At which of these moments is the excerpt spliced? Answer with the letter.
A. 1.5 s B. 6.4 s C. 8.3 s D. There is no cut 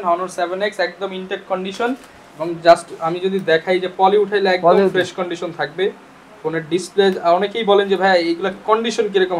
D